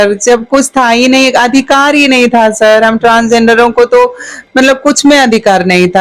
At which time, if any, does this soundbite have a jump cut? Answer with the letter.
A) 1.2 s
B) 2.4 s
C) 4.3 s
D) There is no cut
D